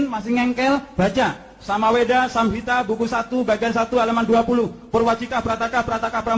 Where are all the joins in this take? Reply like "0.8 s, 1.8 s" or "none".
none